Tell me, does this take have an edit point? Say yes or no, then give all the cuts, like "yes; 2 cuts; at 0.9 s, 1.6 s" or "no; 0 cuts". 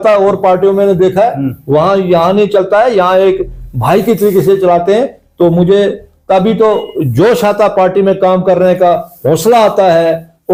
no; 0 cuts